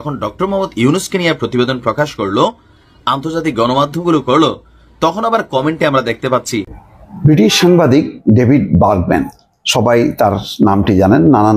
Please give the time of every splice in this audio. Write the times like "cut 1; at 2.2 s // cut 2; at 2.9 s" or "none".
cut 1; at 6.8 s